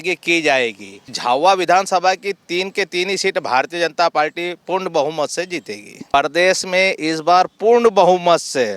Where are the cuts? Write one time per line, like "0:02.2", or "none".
0:01.2
0:06.1